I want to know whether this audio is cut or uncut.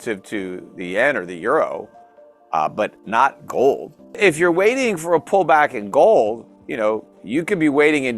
cut